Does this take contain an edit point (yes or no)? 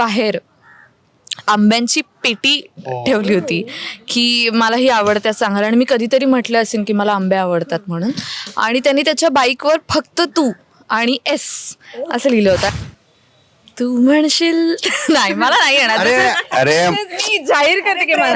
yes